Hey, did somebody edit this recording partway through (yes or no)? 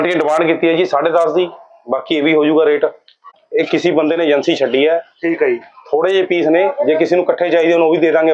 yes